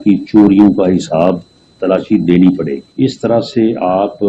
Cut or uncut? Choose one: cut